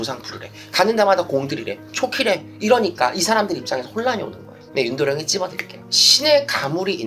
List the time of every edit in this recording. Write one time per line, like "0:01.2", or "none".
none